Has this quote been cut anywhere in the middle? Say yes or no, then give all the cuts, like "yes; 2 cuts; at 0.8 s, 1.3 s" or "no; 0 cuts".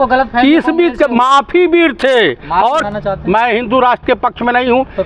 yes; 1 cut; at 2.8 s